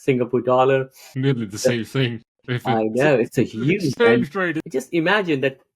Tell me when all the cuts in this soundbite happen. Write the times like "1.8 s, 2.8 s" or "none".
1.0 s, 4.6 s